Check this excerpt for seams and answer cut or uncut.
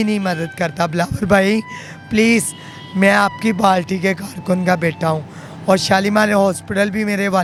uncut